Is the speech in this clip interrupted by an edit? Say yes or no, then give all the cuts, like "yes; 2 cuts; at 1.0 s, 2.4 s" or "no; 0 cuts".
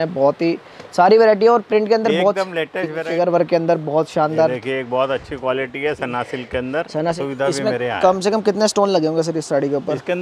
yes; 2 cuts; at 3.1 s, 7.2 s